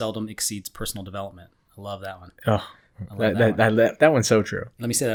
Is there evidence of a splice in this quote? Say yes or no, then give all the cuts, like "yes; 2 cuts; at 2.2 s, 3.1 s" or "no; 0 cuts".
no; 0 cuts